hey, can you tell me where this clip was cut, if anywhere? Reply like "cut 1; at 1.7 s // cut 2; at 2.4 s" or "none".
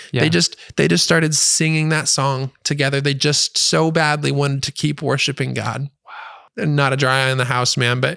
cut 1; at 6.4 s